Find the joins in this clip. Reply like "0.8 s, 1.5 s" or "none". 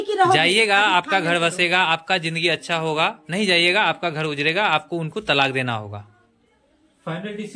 none